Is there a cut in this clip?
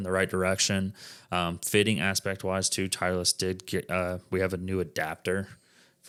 no; 0 cuts

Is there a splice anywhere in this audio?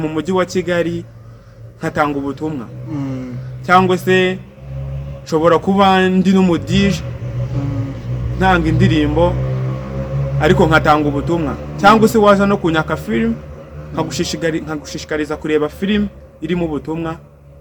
no; 0 cuts

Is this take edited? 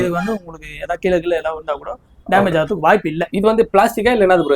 no; 0 cuts

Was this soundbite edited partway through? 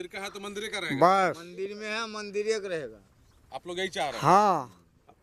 no; 0 cuts

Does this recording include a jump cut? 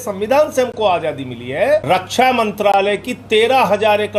yes; 1 cut; at 1.8 s

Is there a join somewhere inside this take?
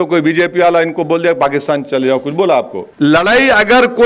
yes; 1 cut; at 2.8 s

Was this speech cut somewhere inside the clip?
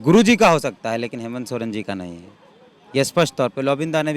no; 0 cuts

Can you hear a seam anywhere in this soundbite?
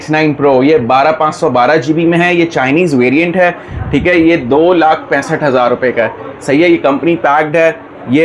no; 0 cuts

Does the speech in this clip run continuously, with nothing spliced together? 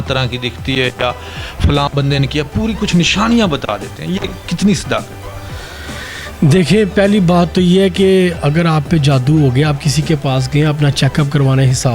yes; 0 cuts

